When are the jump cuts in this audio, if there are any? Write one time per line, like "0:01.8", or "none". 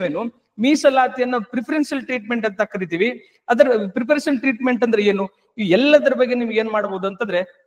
none